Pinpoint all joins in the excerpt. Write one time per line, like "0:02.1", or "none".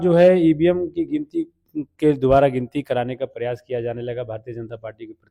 none